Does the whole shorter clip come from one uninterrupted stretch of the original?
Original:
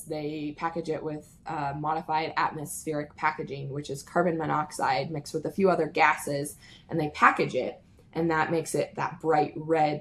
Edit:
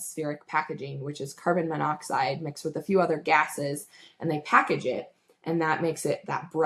yes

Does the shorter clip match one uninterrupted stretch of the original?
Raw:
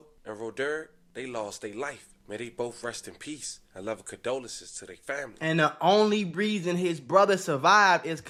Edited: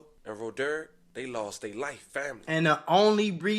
no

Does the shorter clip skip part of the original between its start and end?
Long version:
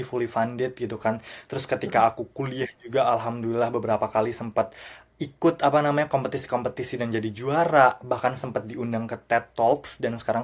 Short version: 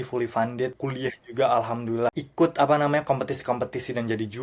yes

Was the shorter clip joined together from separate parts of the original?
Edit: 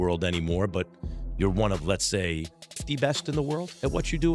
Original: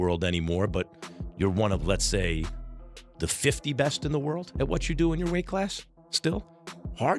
yes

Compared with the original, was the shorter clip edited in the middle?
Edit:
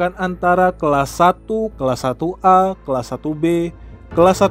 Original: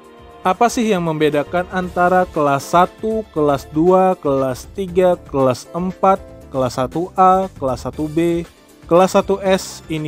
yes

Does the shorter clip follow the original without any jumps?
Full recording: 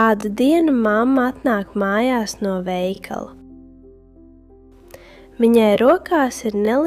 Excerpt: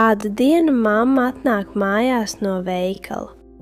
yes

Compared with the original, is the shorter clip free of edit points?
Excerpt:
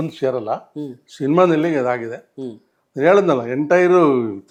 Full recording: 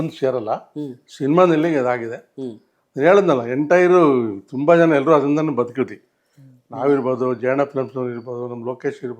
yes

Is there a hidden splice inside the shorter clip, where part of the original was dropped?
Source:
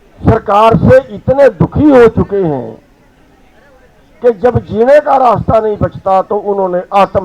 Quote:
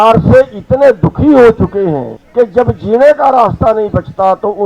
yes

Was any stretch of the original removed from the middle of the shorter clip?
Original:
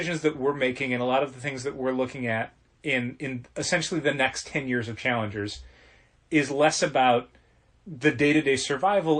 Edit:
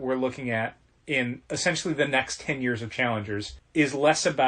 yes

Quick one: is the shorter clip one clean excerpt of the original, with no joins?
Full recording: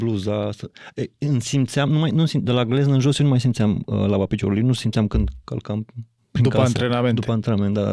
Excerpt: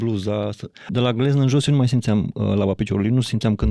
no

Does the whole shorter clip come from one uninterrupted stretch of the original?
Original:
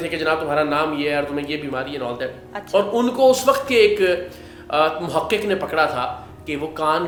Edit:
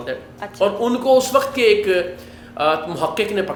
yes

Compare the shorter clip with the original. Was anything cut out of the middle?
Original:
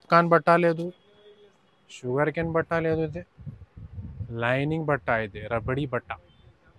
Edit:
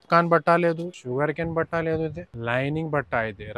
yes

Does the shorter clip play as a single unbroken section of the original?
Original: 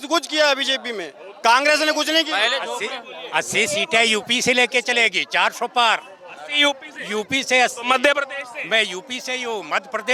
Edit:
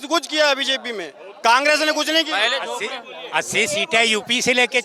yes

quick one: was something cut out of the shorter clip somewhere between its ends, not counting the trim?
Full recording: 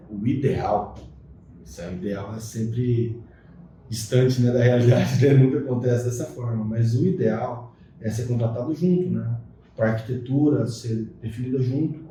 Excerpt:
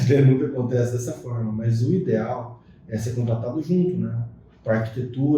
no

